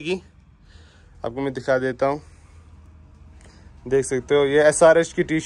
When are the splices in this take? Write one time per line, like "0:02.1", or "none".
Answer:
none